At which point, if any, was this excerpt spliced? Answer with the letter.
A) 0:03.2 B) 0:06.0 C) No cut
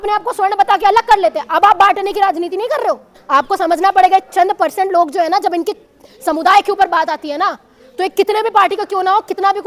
A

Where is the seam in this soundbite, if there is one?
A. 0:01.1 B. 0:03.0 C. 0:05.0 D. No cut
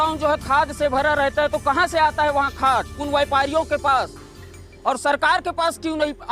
B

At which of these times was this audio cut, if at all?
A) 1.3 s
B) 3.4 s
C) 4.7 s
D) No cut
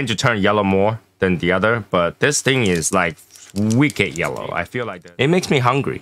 C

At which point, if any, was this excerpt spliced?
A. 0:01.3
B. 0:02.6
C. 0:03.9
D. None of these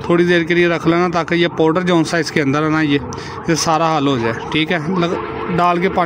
D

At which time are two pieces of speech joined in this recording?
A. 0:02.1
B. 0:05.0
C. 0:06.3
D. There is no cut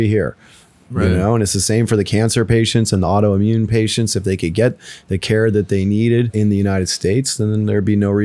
C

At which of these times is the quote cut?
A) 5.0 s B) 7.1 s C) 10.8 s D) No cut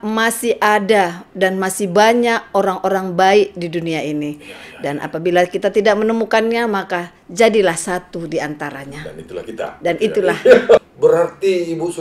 C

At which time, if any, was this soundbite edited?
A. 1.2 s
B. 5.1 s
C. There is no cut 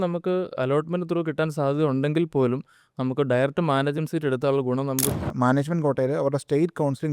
B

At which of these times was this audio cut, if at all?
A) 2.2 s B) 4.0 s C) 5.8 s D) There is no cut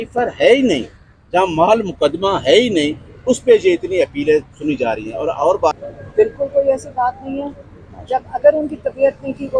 C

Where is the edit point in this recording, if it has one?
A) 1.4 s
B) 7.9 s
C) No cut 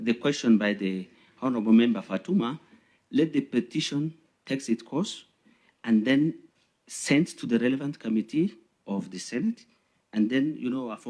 C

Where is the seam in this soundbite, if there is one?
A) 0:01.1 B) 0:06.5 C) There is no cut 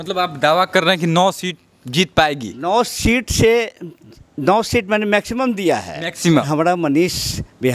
B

